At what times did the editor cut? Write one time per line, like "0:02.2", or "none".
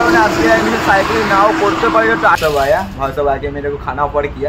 0:02.4